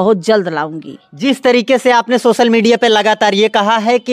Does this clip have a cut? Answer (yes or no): no